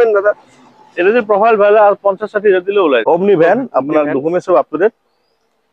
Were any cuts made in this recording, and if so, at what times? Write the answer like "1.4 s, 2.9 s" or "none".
3.0 s